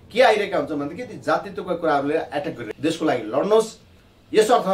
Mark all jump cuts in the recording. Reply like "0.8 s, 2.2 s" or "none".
2.6 s